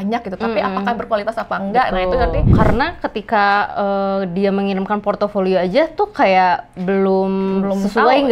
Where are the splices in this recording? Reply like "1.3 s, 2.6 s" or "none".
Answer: 2.5 s

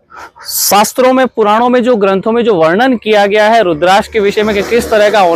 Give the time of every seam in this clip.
none

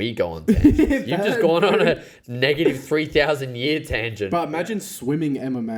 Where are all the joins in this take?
none

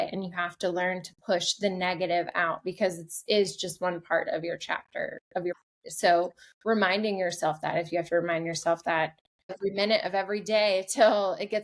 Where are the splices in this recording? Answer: 5.5 s, 9.5 s

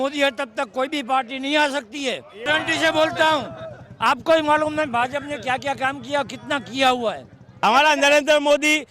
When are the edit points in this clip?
2.5 s, 7.5 s

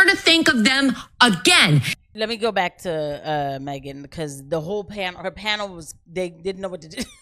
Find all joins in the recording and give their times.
2.0 s

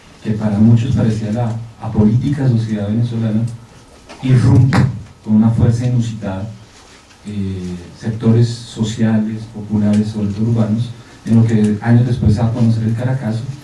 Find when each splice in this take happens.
8.6 s

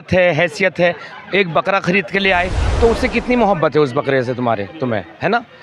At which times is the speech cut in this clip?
2.6 s

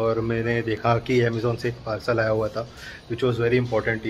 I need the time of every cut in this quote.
none

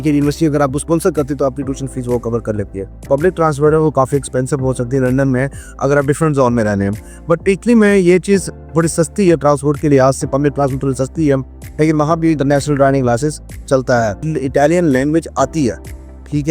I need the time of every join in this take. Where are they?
3.0 s, 14.2 s

